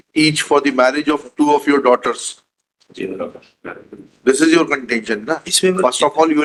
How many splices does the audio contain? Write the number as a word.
zero